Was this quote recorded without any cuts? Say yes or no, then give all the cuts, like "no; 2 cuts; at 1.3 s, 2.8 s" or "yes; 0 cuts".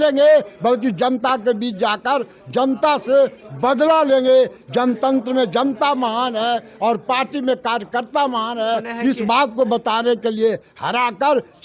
yes; 0 cuts